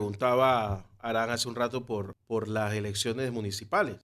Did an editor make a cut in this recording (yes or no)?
yes